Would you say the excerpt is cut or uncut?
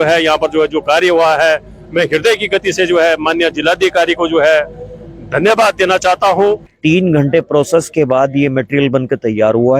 cut